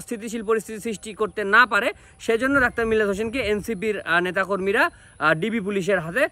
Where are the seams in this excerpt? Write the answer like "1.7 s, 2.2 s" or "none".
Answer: none